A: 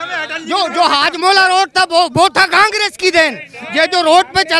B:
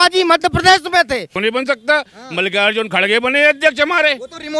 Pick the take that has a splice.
B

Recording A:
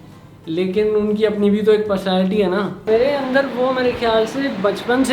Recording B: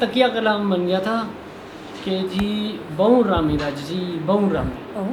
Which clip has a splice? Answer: A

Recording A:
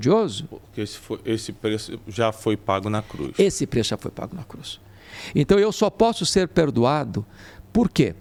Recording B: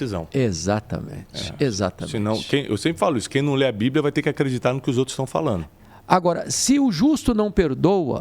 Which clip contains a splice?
B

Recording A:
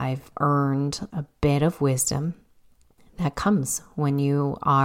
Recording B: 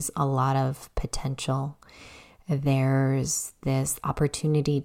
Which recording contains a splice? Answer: A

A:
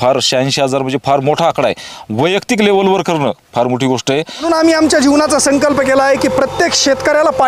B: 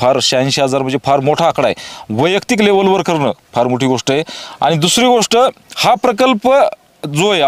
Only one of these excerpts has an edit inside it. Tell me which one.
A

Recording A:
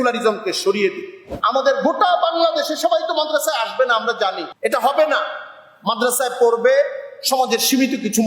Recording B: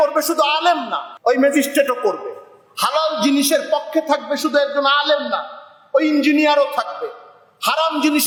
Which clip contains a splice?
A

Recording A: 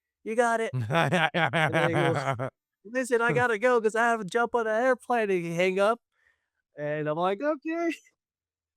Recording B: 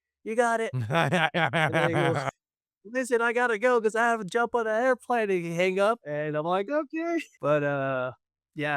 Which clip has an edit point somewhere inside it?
B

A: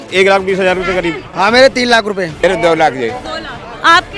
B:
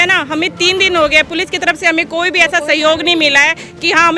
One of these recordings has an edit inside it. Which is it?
A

